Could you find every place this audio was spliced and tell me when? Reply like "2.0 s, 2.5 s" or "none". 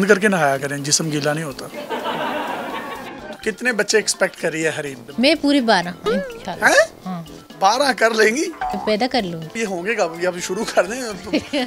3.3 s